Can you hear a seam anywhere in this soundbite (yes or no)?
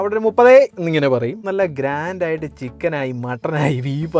yes